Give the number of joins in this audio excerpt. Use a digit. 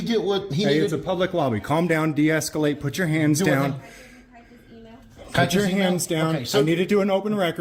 0